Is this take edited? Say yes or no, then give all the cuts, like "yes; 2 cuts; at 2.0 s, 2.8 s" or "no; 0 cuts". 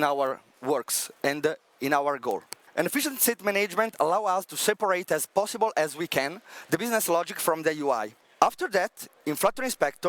yes; 2 cuts; at 2.6 s, 8.2 s